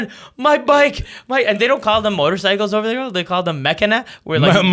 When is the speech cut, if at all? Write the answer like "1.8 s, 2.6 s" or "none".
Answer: none